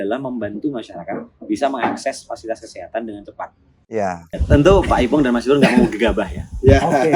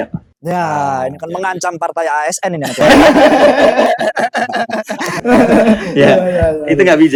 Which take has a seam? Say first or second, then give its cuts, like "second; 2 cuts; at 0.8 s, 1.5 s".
first; 1 cut; at 4.4 s